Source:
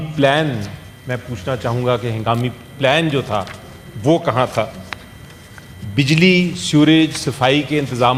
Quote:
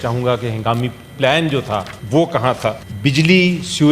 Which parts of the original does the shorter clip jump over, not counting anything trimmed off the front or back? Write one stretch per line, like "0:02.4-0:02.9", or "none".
0:03.6-0:03.9
0:04.8-0:05.8